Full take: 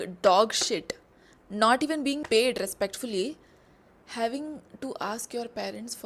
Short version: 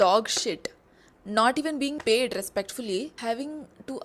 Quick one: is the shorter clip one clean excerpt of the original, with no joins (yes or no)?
no